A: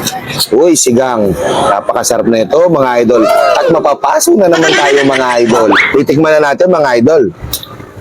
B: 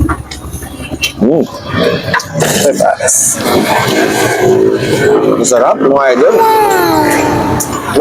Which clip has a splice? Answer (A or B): A